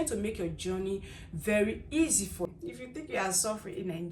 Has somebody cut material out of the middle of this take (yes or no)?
yes